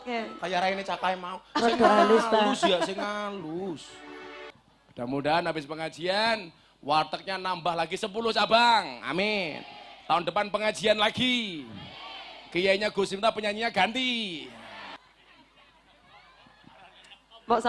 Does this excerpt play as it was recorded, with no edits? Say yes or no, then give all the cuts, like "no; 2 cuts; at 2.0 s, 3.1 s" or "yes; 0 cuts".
no; 2 cuts; at 4.5 s, 15.0 s